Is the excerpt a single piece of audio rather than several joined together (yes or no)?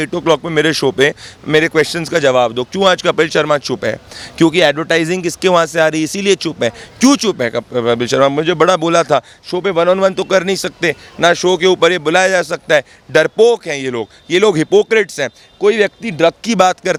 yes